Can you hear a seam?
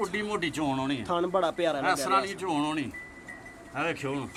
no; 0 cuts

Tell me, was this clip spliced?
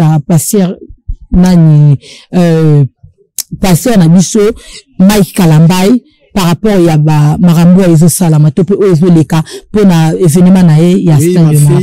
no; 0 cuts

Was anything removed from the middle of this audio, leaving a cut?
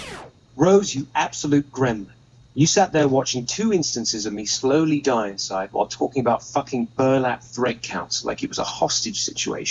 no; 0 cuts

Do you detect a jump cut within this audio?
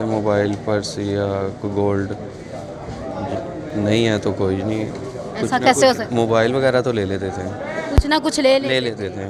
no; 0 cuts

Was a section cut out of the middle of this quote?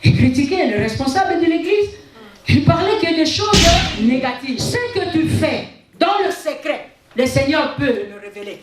yes; 1 cut; at 4.6 s

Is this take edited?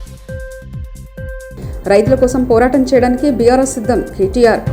no; 0 cuts

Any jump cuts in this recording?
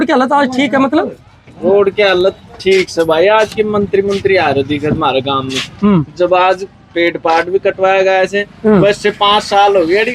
no; 0 cuts

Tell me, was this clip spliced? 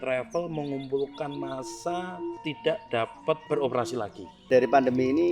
yes; 3 cuts; at 2.4 s, 3.4 s, 4.5 s

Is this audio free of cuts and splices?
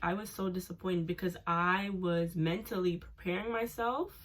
yes; 0 cuts

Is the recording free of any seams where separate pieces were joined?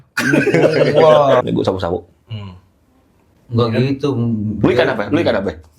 no; 1 cut; at 1.4 s

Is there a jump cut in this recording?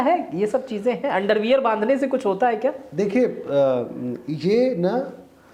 no; 0 cuts

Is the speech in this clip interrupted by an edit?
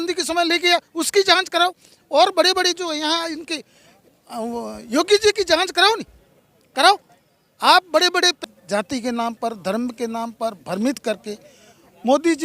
yes; 1 cut; at 8.4 s

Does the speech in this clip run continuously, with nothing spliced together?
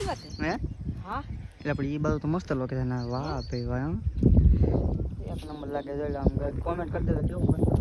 yes; 0 cuts

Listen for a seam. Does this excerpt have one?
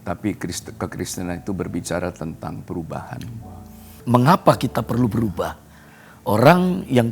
yes; 1 cut; at 4.0 s

